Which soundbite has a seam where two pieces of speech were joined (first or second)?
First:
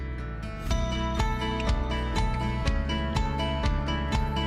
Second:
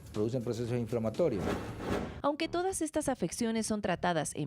second